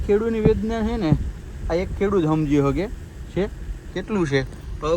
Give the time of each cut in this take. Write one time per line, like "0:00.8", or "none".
none